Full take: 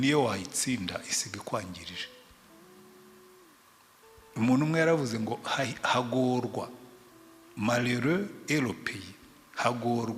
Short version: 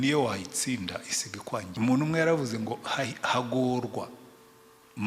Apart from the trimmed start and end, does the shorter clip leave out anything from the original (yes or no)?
yes